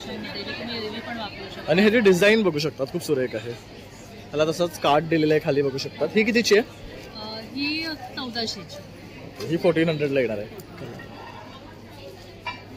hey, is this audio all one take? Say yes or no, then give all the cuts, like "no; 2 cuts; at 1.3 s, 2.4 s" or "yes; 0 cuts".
yes; 0 cuts